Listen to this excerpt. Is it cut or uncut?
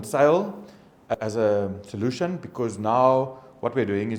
cut